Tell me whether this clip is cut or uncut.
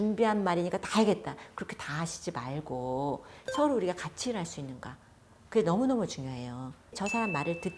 cut